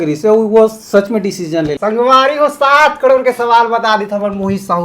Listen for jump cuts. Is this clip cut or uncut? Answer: cut